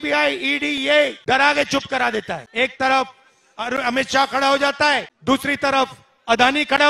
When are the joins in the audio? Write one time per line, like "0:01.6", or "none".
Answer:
0:01.2
0:02.5
0:05.1